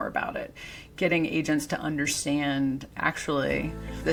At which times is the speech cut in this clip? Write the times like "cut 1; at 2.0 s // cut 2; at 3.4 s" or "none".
none